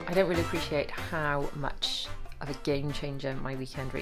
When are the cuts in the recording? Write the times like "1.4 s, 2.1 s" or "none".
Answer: none